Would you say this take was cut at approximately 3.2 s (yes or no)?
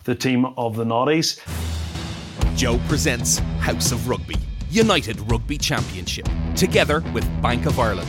no